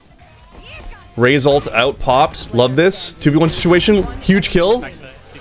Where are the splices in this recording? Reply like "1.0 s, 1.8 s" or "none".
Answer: none